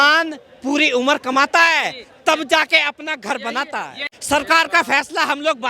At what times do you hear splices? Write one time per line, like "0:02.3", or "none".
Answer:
0:04.1